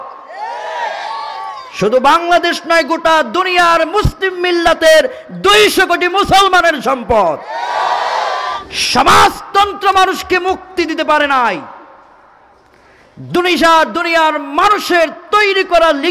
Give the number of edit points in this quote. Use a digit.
1